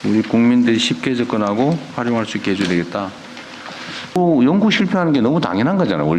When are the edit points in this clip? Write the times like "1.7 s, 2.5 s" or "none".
4.2 s